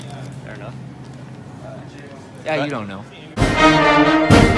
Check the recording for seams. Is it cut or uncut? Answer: cut